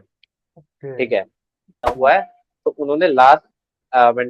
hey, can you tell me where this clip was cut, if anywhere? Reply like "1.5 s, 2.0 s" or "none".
1.8 s

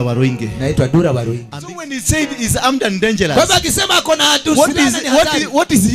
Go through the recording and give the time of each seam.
1.5 s

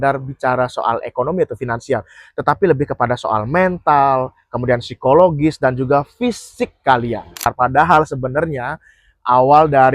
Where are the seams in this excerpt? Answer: 7.5 s

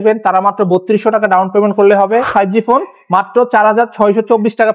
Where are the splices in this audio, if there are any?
2.3 s

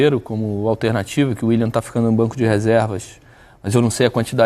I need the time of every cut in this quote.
none

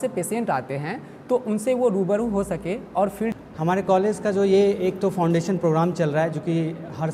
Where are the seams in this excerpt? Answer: 3.3 s

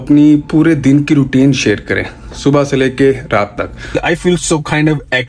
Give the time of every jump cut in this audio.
4.0 s

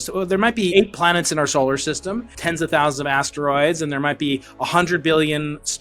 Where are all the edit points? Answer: 0.7 s, 2.3 s

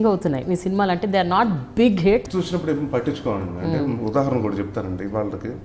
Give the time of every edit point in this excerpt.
2.3 s

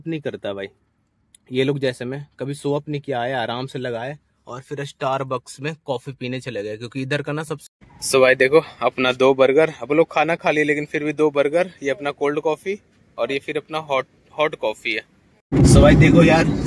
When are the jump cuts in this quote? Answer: 7.6 s, 15.4 s

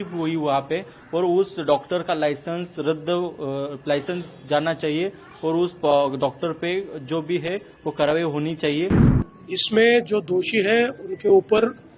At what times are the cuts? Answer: 9.1 s

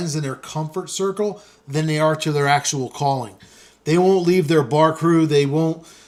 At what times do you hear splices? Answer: none

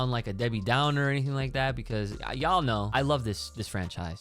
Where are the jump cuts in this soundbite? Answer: 2.9 s

